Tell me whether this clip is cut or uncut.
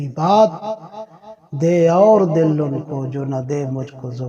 uncut